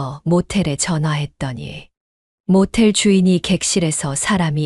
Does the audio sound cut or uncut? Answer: uncut